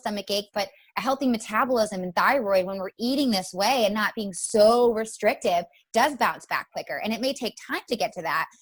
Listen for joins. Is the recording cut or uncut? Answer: uncut